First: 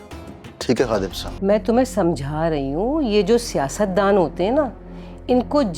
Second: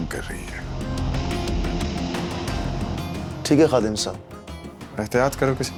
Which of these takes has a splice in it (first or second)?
first